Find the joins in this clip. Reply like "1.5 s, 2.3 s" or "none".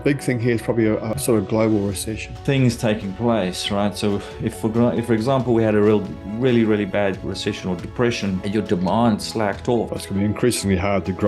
1.1 s, 2.2 s, 9.9 s